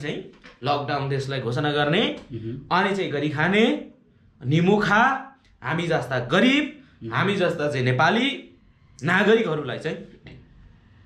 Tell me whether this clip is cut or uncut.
uncut